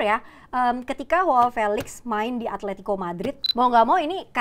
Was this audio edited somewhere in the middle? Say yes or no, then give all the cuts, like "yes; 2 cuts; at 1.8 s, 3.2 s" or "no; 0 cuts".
yes; 1 cut; at 3.4 s